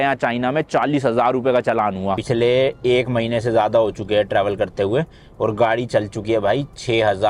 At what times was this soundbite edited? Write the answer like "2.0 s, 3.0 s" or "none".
2.2 s